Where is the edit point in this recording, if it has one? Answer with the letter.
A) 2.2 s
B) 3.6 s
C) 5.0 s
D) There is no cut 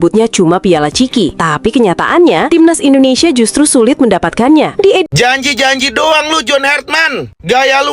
C